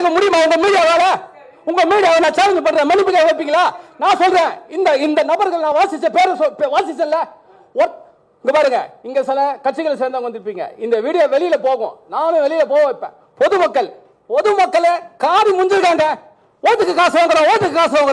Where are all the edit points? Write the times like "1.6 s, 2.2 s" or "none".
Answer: none